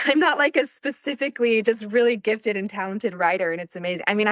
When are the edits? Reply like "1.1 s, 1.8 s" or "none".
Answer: none